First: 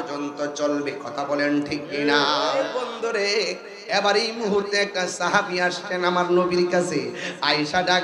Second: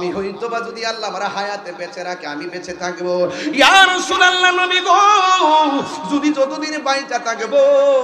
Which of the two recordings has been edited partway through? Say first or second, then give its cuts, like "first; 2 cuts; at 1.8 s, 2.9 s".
first; 1 cut; at 2.6 s